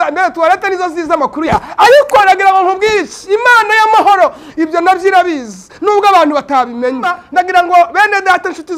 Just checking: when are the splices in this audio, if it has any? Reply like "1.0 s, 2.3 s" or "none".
7.2 s